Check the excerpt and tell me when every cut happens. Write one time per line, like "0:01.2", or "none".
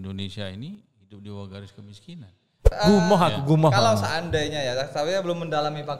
0:02.7